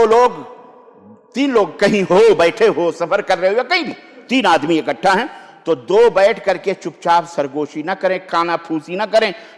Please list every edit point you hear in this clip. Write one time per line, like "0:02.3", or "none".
none